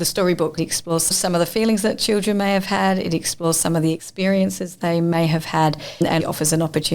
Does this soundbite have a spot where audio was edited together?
yes; 2 cuts; at 1.1 s, 6.1 s

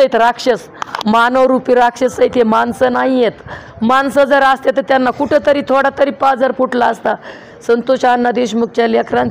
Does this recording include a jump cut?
no; 0 cuts

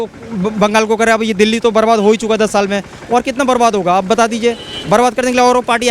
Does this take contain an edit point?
no; 0 cuts

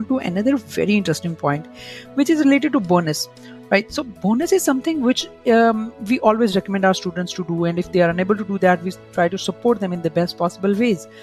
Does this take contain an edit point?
no; 0 cuts

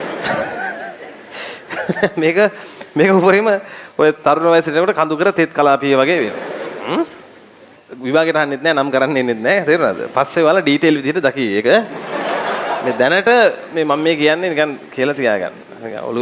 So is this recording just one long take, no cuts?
no; 1 cut; at 7.8 s

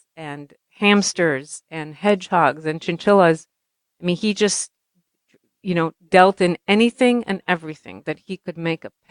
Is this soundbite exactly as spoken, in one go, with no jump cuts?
yes; 0 cuts

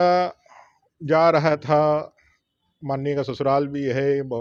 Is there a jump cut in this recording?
no; 0 cuts

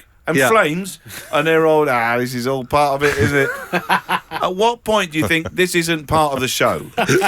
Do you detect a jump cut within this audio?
no; 0 cuts

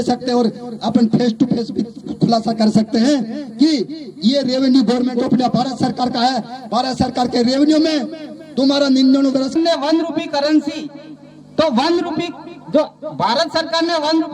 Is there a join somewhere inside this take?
yes; 1 cut; at 9.5 s

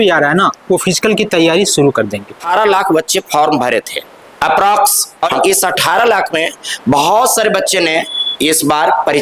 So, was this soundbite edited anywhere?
yes; 2 cuts; at 2.4 s, 5.3 s

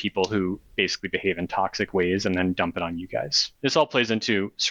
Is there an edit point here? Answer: yes; 1 cut; at 3.4 s

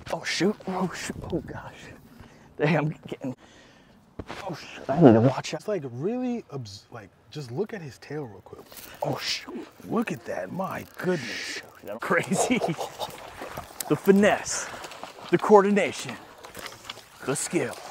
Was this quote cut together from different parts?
yes; 3 cuts; at 3.4 s, 5.6 s, 12.0 s

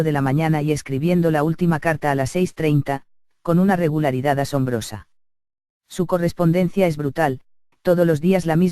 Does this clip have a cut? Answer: no; 0 cuts

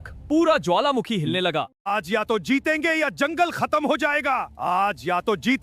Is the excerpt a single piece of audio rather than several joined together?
no; 1 cut; at 1.7 s

